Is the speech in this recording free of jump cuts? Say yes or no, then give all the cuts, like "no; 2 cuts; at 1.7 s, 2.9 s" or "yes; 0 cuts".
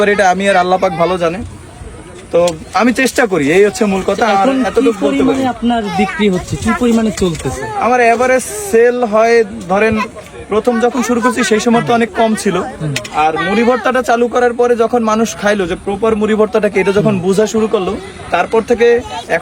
yes; 0 cuts